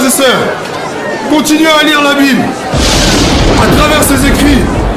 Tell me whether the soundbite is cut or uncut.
uncut